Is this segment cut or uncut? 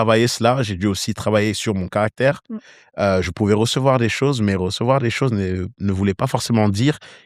uncut